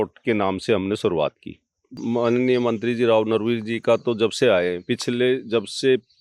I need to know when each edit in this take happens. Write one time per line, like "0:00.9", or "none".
0:01.9